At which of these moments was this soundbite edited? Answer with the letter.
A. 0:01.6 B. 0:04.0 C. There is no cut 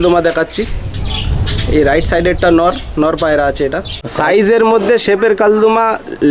B